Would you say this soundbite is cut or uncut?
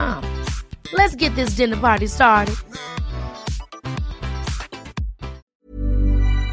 cut